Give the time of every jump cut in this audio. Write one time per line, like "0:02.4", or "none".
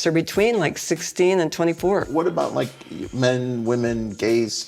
0:02.1